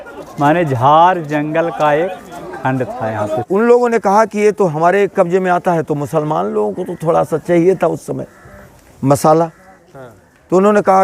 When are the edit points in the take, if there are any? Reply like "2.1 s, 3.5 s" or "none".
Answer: 3.4 s